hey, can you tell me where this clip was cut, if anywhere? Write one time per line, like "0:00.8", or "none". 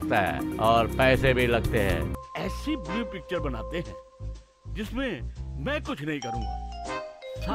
0:06.5